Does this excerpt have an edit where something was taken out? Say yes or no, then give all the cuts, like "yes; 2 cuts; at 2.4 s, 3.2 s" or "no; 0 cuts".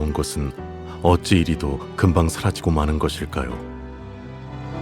yes; 1 cut; at 3.6 s